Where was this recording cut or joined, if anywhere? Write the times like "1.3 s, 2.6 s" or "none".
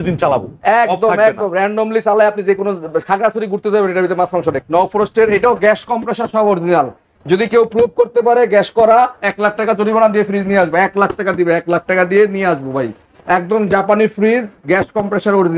4.6 s

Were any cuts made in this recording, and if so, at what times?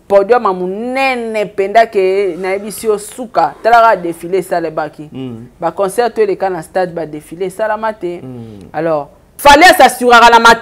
9.2 s

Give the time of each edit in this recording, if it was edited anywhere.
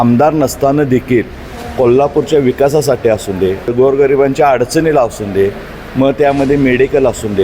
3.7 s

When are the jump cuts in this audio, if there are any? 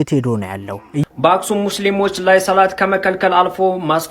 0.9 s

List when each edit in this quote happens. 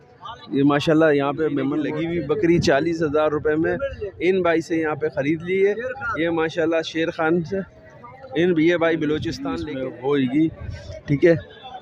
1.8 s, 9.4 s

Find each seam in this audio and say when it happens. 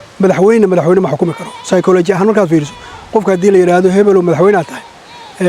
none

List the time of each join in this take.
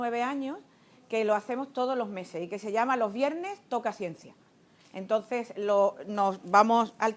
3.2 s

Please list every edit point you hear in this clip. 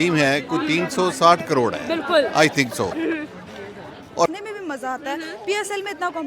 4.3 s

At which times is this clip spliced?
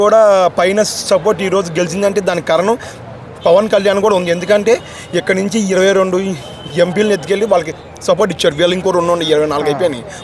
none

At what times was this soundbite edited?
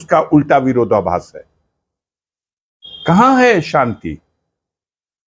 none

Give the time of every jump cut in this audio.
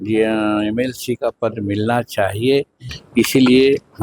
2.9 s

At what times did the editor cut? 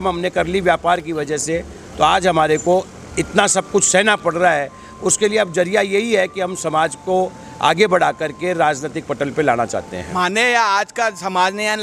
none

